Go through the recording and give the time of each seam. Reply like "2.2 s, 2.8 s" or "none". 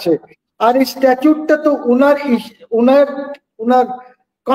none